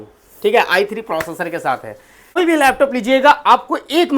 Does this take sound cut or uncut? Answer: cut